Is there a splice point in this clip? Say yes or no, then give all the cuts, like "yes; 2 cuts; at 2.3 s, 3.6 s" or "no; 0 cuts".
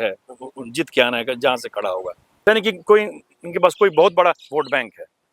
yes; 1 cut; at 2.4 s